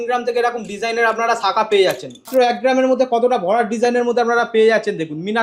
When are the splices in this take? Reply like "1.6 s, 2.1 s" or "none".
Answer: 2.1 s